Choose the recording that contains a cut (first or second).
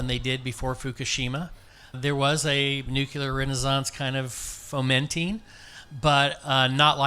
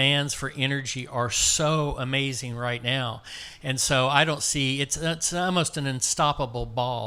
first